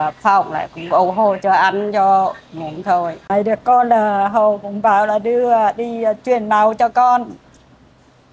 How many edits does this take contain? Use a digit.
1